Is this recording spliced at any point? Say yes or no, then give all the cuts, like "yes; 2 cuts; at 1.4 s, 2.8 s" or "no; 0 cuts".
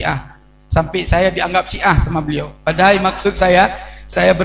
no; 0 cuts